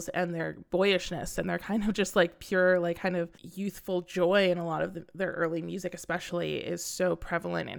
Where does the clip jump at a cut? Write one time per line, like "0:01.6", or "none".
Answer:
0:03.4